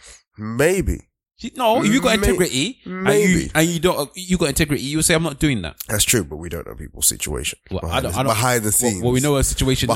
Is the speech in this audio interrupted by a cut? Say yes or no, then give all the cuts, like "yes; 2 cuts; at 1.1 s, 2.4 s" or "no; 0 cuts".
no; 0 cuts